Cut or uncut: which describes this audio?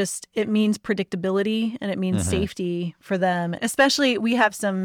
cut